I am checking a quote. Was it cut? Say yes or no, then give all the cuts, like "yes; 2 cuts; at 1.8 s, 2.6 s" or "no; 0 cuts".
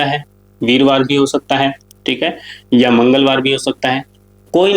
no; 0 cuts